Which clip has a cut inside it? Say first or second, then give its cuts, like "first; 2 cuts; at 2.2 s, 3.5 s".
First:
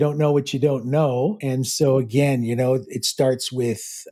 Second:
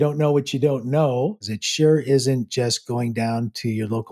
second; 1 cut; at 1.4 s